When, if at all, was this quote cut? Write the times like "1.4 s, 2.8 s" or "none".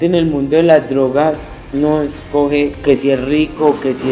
2.8 s